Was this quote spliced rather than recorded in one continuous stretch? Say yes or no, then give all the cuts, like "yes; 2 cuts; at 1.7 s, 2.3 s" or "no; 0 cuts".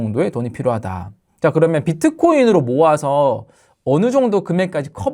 no; 0 cuts